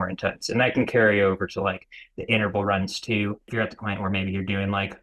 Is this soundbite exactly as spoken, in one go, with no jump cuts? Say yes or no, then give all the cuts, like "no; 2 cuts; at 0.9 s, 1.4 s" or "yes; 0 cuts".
no; 1 cut; at 3.5 s